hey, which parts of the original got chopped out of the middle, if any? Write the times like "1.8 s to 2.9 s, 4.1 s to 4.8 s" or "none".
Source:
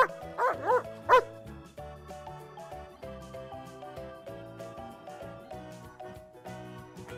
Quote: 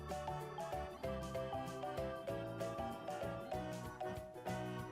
none